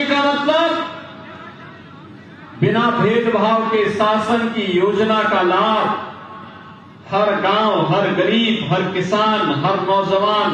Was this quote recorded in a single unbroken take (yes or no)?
yes